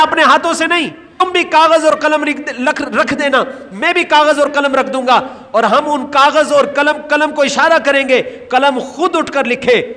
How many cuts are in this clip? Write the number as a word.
one